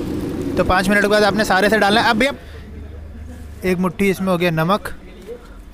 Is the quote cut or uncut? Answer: cut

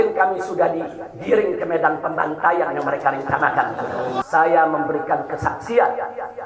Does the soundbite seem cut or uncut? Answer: cut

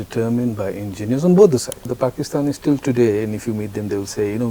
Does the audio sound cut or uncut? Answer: cut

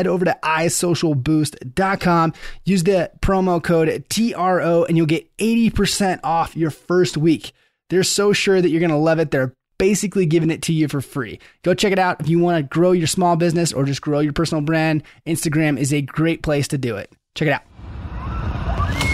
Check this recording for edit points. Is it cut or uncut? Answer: cut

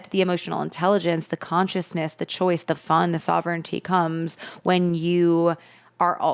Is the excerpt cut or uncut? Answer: uncut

